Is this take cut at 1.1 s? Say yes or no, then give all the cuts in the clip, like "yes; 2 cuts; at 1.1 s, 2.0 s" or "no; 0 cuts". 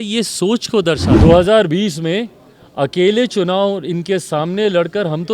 yes; 1 cut; at 1.1 s